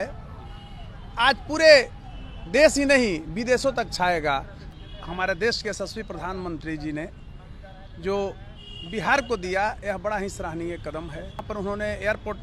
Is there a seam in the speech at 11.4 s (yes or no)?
yes